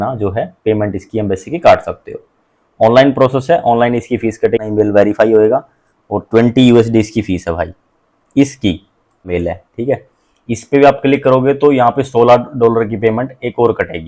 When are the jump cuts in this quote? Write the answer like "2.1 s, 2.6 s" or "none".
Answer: 4.6 s, 9.3 s